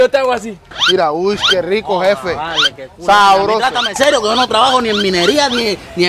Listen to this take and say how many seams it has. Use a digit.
0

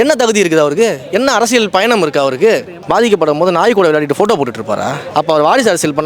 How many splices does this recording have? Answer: 2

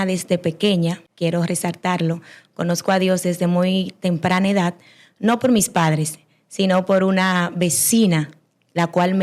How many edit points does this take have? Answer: 1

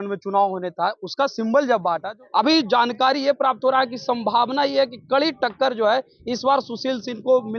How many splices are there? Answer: 1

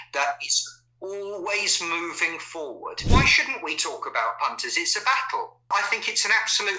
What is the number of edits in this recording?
2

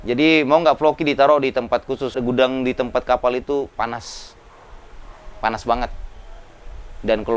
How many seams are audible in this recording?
1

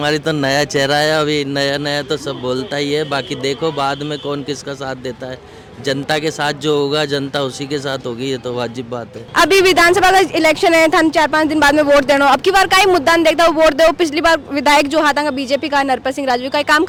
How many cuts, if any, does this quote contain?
0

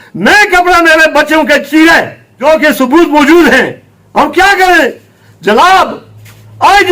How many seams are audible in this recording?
1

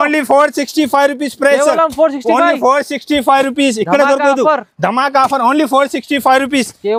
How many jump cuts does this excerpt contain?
0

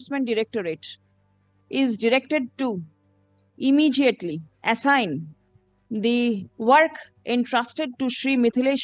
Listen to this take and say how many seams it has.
2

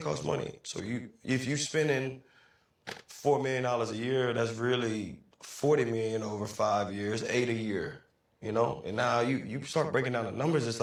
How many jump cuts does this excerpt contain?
0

